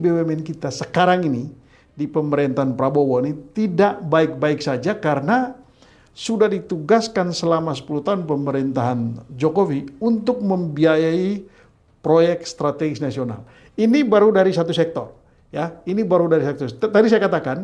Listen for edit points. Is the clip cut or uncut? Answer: uncut